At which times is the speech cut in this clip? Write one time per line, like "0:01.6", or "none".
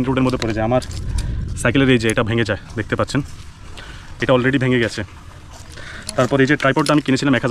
none